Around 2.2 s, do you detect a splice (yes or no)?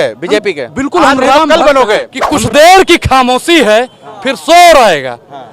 yes